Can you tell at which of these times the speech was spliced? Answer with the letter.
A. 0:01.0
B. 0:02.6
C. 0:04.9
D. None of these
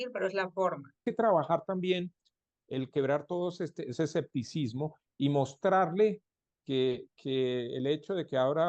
A